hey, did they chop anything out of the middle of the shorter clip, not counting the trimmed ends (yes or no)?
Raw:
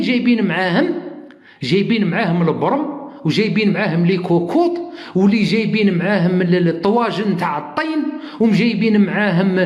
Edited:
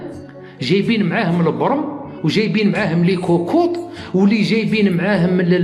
no